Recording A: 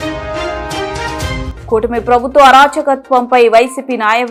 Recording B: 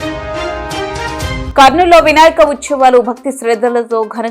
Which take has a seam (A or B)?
B